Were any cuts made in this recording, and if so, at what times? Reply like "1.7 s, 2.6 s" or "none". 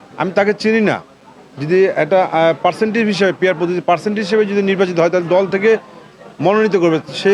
none